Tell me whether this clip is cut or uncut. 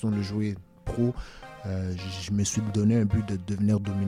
uncut